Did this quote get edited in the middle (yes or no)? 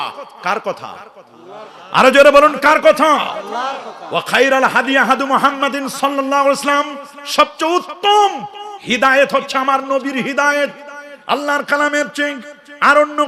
no